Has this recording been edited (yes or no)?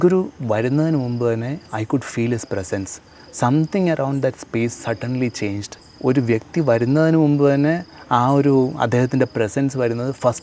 yes